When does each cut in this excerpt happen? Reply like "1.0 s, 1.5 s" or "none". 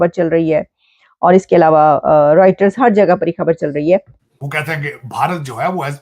4.2 s